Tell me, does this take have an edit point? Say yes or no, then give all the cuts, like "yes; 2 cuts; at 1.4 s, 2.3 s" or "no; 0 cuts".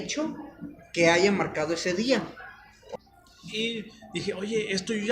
yes; 1 cut; at 2.7 s